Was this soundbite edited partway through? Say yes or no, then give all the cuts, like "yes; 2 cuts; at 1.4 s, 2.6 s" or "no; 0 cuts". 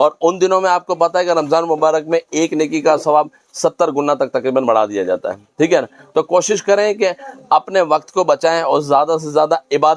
no; 0 cuts